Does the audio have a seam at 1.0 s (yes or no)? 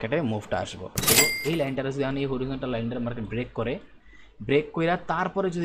yes